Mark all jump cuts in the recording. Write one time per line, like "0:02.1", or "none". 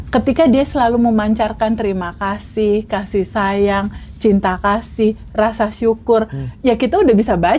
none